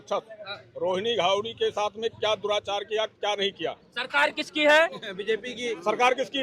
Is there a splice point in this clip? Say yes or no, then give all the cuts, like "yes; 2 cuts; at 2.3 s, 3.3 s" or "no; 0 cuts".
no; 0 cuts